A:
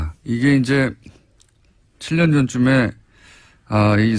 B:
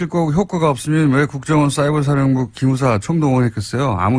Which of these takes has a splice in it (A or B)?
B